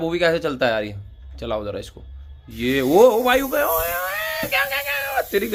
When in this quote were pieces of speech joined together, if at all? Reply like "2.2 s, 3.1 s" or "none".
none